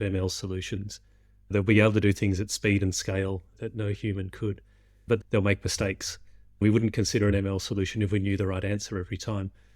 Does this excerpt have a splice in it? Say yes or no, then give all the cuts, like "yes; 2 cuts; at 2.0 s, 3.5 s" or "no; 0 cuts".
yes; 3 cuts; at 1.5 s, 5.2 s, 6.6 s